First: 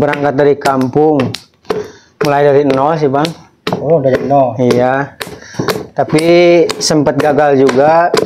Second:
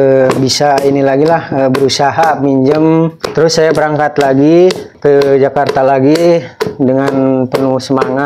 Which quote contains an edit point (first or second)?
second